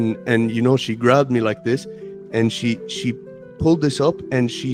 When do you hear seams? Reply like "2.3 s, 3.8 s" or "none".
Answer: none